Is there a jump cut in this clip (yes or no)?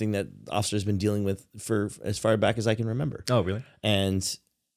no